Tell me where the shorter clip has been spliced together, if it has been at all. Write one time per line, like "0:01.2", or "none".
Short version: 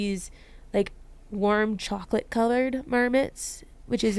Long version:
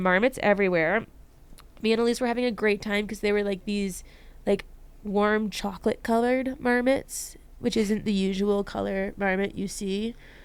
none

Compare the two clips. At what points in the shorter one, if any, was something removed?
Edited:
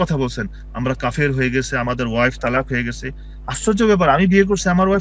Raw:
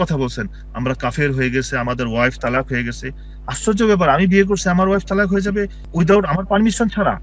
none

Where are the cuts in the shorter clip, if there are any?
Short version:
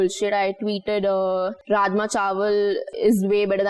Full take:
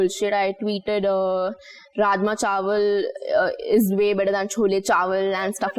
0:01.6
0:02.9

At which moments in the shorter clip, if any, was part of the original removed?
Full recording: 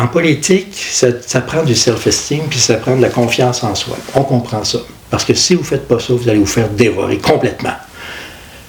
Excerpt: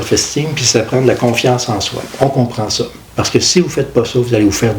none

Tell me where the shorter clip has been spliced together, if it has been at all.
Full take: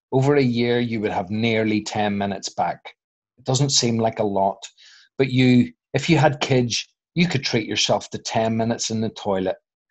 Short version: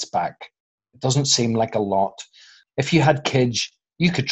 0:02.6

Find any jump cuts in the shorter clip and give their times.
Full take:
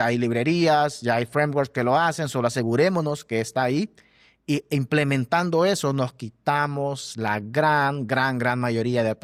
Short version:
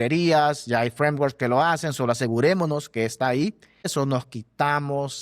0:03.9

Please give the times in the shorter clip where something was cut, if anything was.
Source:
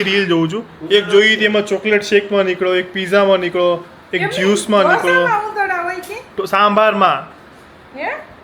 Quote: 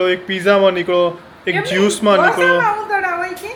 none

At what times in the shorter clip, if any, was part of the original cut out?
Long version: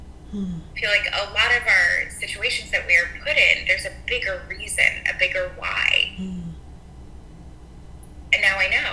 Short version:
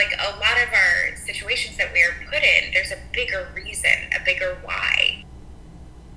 0:05.1

